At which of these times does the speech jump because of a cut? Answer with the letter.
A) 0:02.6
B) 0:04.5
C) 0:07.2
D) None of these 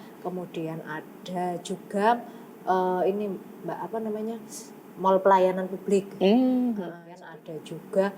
C